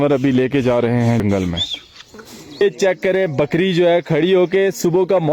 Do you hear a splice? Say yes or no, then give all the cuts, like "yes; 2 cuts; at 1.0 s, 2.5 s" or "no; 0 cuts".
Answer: yes; 2 cuts; at 1.2 s, 2.6 s